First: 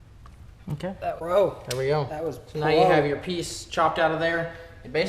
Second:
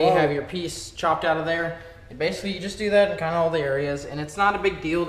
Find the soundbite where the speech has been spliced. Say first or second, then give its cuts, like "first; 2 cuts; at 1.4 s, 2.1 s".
first; 1 cut; at 1.2 s